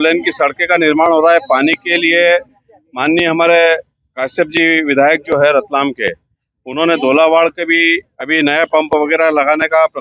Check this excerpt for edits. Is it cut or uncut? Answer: uncut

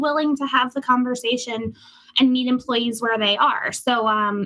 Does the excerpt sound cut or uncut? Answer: uncut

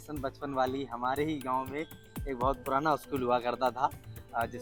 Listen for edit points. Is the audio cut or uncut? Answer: uncut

